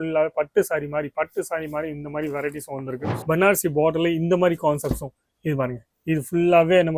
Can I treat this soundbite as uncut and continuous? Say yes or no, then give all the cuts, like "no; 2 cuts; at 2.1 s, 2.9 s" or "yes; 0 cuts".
no; 1 cut; at 3.1 s